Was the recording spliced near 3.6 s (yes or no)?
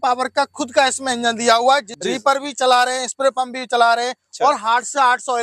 no